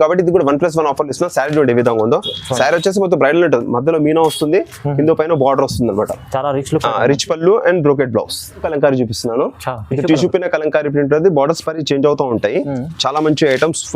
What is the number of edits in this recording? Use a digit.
1